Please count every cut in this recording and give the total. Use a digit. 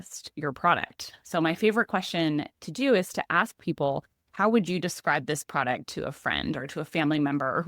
0